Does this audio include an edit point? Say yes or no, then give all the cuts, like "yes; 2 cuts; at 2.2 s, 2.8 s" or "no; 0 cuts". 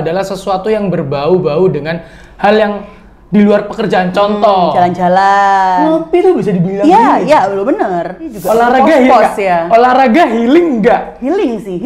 yes; 1 cut; at 8.4 s